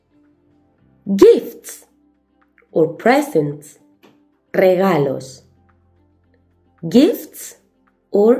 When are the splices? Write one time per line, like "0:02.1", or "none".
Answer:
0:01.0